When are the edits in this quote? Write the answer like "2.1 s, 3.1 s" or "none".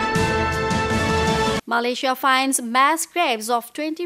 1.6 s